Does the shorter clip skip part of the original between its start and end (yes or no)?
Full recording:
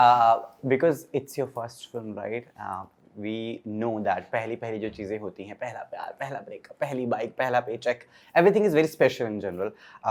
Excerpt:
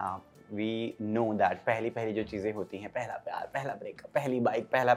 no